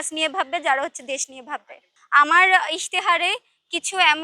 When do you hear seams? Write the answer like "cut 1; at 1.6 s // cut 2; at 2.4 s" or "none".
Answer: cut 1; at 1.9 s